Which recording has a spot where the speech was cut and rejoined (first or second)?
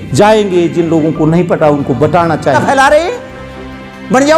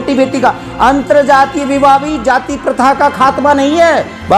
first